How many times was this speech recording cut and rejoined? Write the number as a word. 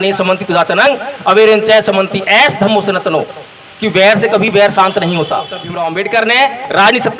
one